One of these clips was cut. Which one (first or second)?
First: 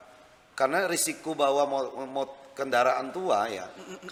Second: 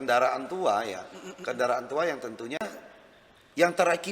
second